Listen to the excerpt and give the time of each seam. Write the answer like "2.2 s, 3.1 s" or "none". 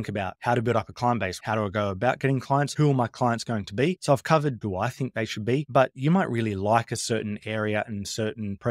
2.7 s

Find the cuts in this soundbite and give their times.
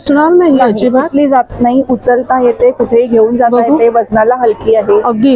none

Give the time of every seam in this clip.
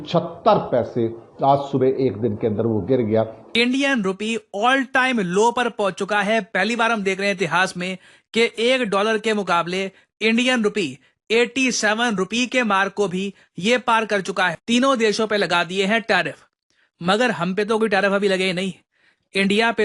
3.4 s, 14.5 s

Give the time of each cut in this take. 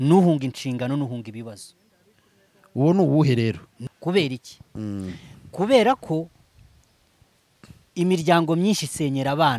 3.7 s

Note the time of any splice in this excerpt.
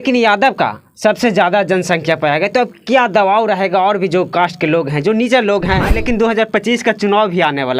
5.9 s

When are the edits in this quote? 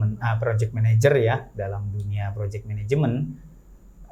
none

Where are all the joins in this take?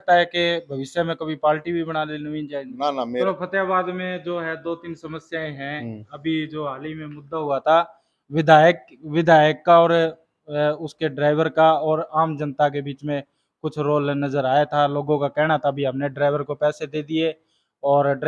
3.2 s

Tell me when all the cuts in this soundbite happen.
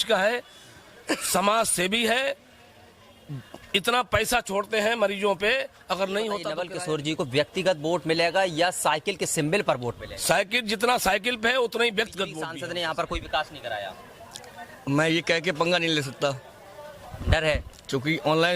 6.6 s, 12.6 s

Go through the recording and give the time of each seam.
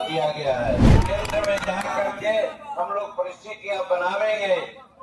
0.9 s

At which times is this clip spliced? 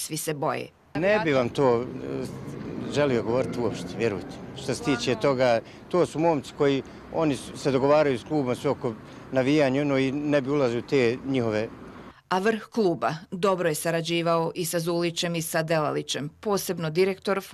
none

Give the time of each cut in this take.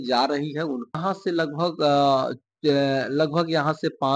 1.0 s

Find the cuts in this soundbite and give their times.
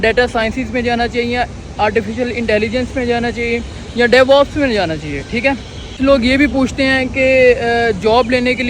6.0 s

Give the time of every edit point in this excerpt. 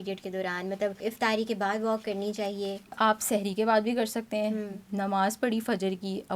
1.0 s, 3.0 s

